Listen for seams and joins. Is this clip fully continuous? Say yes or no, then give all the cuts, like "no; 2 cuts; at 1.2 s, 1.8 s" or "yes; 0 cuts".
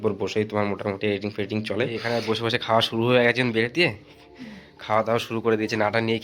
no; 1 cut; at 2.0 s